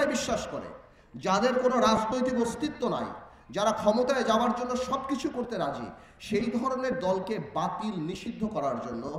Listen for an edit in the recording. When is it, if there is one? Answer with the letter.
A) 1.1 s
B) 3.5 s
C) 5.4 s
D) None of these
D